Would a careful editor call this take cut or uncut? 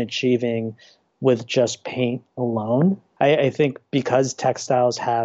cut